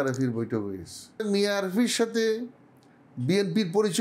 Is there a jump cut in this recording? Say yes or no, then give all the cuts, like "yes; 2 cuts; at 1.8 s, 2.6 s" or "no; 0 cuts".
yes; 1 cut; at 1.2 s